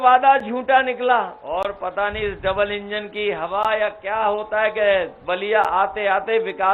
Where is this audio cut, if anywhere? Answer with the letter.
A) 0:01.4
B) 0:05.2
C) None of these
A